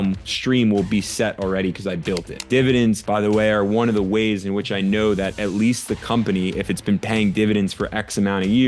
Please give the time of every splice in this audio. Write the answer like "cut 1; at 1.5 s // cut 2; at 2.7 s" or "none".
cut 1; at 2.5 s